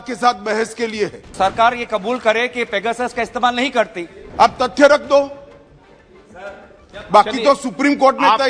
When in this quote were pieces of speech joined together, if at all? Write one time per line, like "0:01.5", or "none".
0:01.2
0:04.2